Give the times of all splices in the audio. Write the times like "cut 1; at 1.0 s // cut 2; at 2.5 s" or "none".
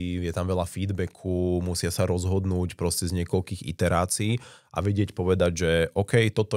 none